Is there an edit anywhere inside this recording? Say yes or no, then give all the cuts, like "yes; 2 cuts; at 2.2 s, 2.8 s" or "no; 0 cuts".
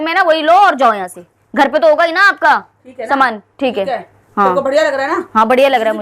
no; 0 cuts